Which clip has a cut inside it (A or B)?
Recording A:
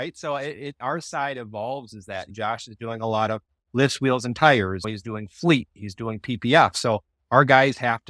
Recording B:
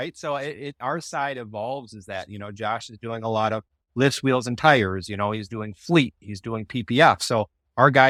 A